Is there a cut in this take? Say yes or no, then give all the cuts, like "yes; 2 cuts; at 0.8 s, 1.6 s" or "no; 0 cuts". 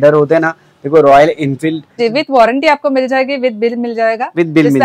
yes; 1 cut; at 2.0 s